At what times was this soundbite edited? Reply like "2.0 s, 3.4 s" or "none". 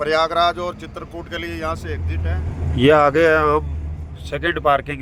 2.1 s